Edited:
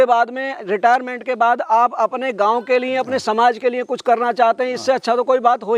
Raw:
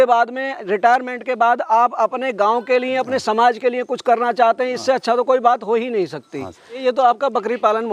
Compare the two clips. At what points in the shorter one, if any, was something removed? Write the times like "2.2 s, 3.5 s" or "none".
none